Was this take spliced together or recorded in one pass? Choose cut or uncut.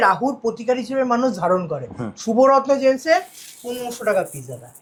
uncut